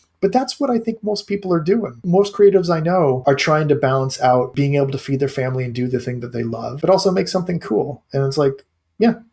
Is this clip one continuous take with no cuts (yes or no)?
no